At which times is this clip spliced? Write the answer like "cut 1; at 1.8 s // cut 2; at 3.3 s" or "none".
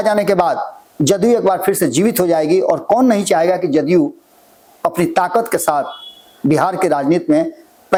none